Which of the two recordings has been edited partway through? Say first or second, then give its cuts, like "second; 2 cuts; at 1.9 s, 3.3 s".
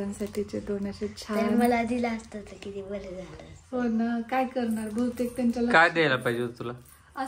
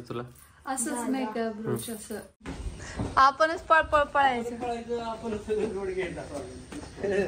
second; 1 cut; at 2.6 s